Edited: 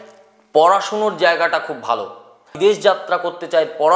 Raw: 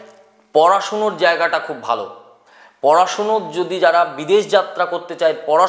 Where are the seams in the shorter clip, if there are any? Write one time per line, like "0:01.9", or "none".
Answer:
0:02.5